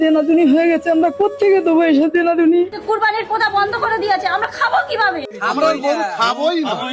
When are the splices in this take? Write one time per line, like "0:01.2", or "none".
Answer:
0:02.7